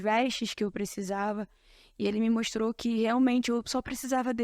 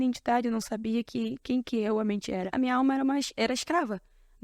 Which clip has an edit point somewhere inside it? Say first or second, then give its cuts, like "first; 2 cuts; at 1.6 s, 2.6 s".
second; 1 cut; at 2.5 s